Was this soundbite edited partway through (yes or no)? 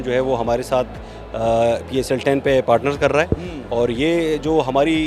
no